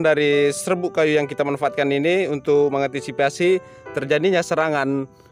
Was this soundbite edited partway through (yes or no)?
no